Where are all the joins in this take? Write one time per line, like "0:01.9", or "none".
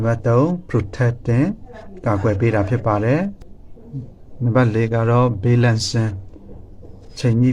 0:04.0